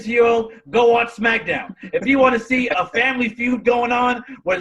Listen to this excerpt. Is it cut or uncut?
cut